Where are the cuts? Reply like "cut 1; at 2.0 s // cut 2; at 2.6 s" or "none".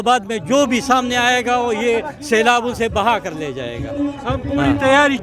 none